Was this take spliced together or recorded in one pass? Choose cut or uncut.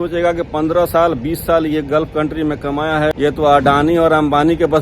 cut